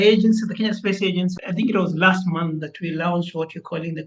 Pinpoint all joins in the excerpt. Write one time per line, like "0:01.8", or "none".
0:01.4